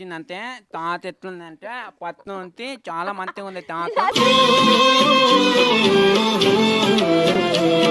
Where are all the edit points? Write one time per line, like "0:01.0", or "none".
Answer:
none